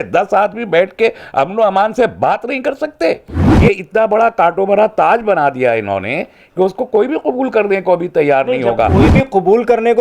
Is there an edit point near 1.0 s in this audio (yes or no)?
no